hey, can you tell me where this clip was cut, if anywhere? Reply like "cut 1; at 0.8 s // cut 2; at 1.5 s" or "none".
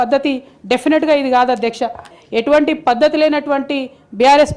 cut 1; at 2.1 s

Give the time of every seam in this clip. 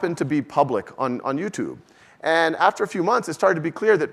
none

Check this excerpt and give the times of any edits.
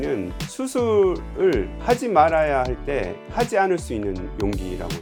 none

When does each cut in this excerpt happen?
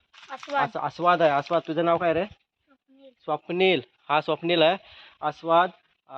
none

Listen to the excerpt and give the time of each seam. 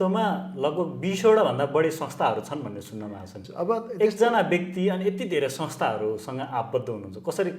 cut 1; at 3.3 s

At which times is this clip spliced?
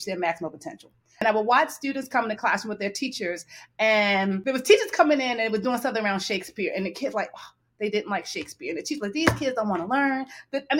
cut 1; at 1.2 s // cut 2; at 4.4 s

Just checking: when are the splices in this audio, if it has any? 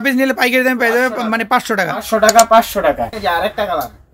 cut 1; at 3.1 s

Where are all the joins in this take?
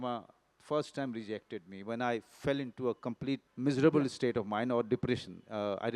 cut 1; at 3.5 s

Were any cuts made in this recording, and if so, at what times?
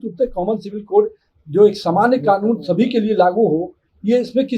none

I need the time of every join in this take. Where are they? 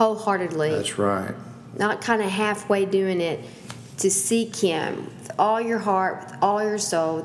none

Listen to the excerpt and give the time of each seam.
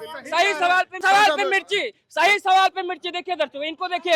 cut 1; at 1.0 s

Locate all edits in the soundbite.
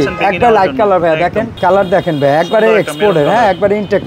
cut 1; at 1.5 s

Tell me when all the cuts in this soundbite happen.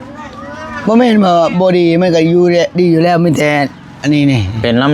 none

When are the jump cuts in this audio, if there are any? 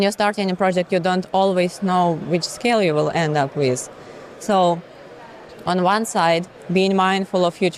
none

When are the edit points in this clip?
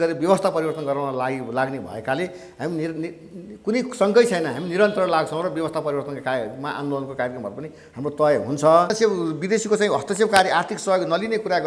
cut 1; at 8.9 s

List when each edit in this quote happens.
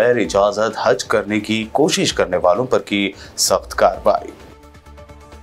none

